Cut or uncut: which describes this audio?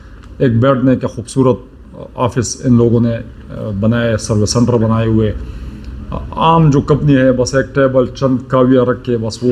uncut